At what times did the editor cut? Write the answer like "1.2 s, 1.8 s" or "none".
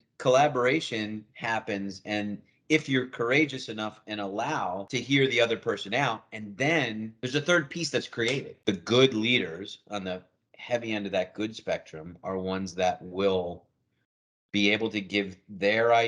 8.5 s

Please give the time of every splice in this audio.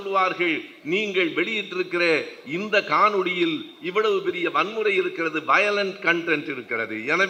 none

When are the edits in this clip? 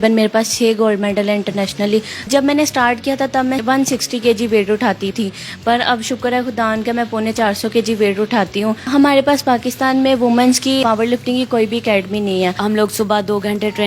2.3 s, 3.6 s, 5.1 s, 8.8 s, 10.8 s, 12.6 s

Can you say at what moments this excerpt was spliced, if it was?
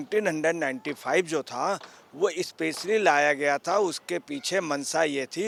none

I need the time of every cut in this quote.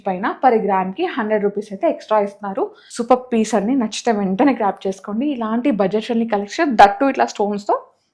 2.8 s

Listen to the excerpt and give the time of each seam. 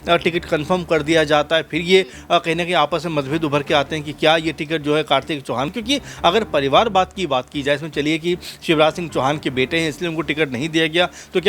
5.7 s

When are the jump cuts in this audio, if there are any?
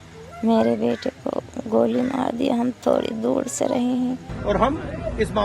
4.3 s

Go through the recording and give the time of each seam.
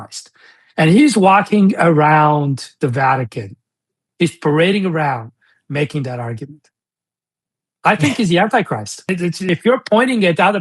9.5 s

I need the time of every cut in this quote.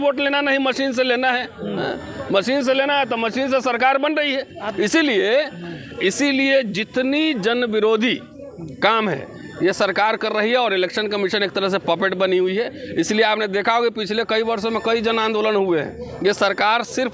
none

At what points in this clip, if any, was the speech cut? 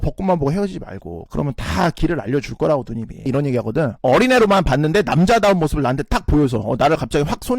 1.2 s, 3.2 s

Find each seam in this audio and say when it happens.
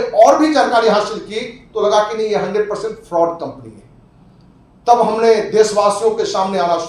none

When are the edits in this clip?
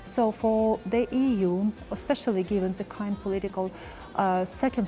none

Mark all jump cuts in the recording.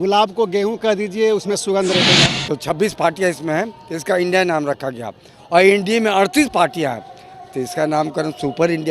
2.3 s

